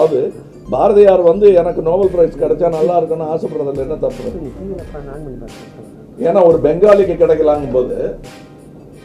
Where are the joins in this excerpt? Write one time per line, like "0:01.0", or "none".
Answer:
none